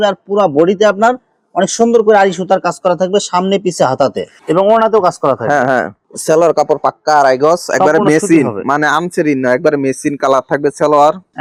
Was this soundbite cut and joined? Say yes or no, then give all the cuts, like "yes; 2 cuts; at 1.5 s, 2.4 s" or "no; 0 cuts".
no; 0 cuts